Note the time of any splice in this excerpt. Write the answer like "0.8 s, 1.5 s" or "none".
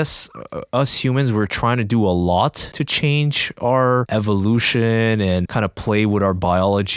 2.7 s, 4.1 s, 5.5 s